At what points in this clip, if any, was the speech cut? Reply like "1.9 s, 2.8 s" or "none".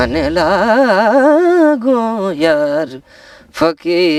none